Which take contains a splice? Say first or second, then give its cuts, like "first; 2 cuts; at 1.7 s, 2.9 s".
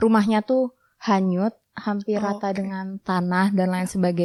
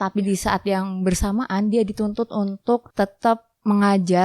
second; 1 cut; at 2.9 s